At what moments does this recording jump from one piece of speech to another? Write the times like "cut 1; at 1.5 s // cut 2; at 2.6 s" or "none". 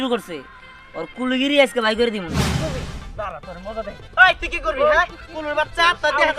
cut 1; at 2.6 s